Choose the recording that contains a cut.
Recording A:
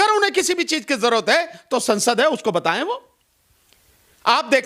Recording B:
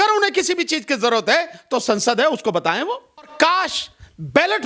B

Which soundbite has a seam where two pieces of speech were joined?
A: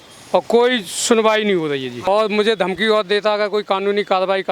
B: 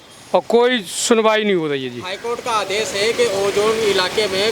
A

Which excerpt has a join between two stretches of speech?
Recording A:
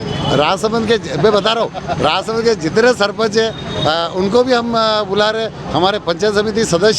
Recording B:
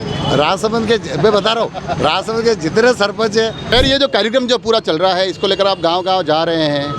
B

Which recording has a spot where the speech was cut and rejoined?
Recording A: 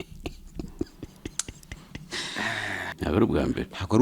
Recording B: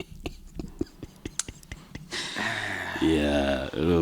A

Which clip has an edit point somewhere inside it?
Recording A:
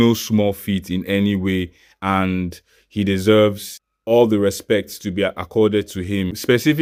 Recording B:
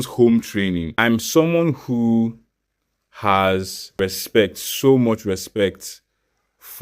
B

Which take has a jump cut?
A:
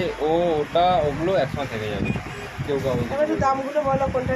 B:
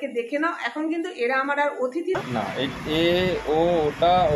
B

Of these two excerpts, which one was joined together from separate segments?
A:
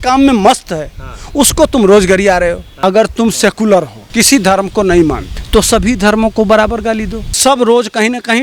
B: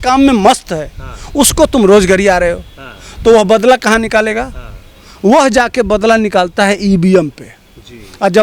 A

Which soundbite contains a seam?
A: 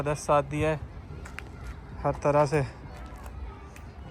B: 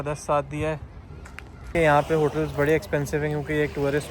B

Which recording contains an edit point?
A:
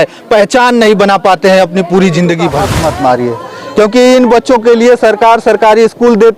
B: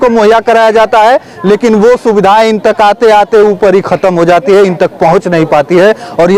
A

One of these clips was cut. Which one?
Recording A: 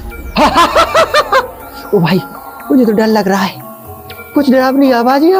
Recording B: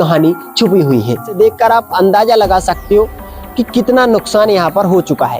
B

